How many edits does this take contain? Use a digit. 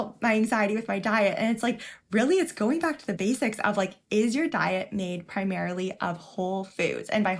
1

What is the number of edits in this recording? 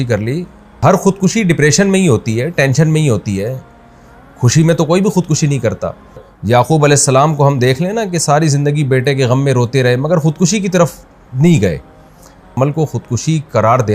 3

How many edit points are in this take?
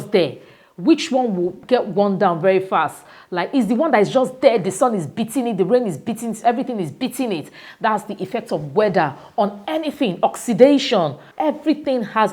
1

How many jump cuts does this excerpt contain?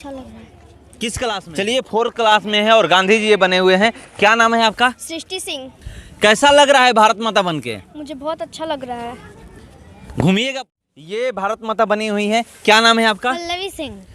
2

